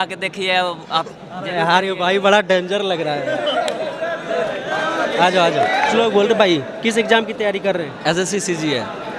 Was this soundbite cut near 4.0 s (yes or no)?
no